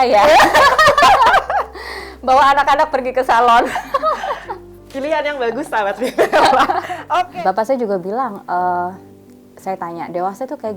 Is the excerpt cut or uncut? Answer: cut